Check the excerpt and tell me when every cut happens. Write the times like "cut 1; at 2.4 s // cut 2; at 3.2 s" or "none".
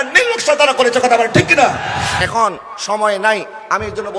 cut 1; at 2.1 s